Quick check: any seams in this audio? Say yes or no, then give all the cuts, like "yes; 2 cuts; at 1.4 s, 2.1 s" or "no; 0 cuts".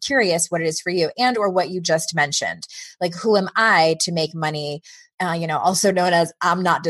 yes; 1 cut; at 5.1 s